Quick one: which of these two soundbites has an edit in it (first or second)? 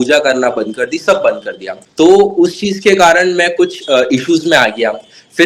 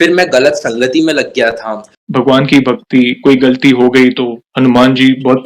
second